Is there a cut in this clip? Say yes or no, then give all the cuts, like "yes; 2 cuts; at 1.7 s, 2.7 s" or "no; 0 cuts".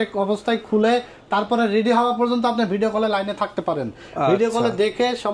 no; 0 cuts